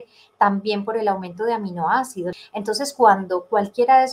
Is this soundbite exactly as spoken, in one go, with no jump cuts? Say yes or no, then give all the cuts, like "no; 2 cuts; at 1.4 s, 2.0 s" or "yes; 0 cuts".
no; 1 cut; at 2.4 s